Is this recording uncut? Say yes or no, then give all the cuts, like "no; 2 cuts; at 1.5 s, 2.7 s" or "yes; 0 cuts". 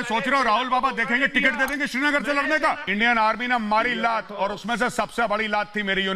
no; 1 cut; at 2.8 s